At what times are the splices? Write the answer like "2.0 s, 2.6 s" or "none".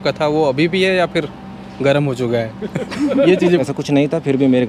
3.6 s